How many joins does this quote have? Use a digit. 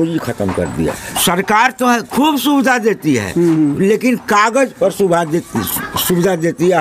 1